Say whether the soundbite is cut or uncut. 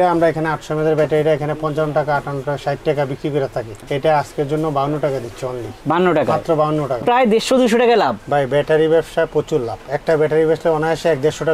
cut